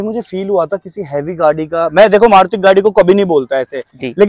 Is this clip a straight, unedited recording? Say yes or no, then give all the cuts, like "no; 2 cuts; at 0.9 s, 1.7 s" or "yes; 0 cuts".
yes; 0 cuts